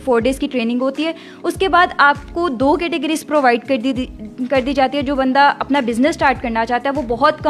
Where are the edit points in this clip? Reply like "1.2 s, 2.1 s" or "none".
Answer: none